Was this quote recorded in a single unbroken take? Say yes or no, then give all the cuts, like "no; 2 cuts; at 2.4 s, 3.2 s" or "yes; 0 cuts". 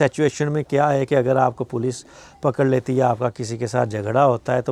yes; 0 cuts